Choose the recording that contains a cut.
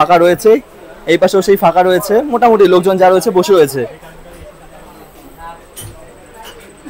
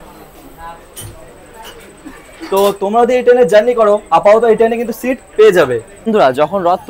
second; 1 cut; at 5.9 s

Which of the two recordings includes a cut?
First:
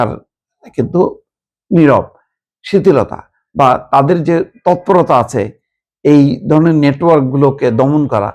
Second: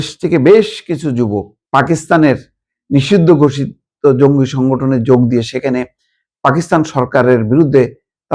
second; 1 cut; at 1.5 s

